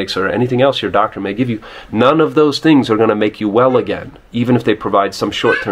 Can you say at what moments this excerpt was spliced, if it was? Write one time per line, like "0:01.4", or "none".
none